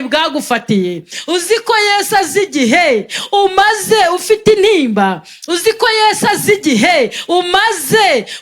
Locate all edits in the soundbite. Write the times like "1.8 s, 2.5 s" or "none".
none